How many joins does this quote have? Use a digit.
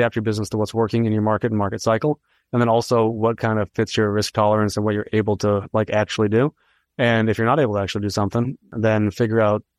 1